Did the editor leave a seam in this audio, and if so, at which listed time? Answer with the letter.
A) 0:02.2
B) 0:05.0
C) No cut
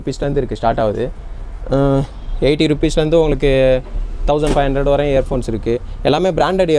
C